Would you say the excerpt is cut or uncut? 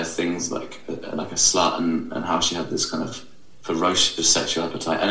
uncut